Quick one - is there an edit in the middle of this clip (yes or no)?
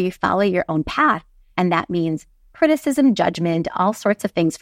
no